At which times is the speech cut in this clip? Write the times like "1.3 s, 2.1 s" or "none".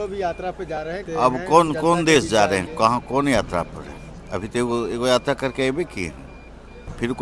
1.0 s